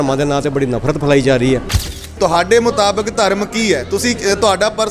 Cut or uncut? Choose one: cut